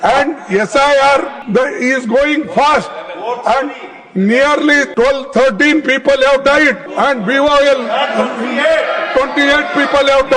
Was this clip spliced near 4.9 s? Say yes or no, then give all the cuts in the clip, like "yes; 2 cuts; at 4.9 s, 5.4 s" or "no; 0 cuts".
yes; 3 cuts; at 1.4 s, 4.9 s, 6.8 s